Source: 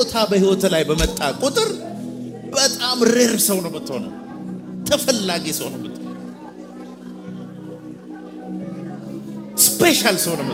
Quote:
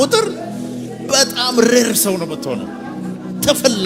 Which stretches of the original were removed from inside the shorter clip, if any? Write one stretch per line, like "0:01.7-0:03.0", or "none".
none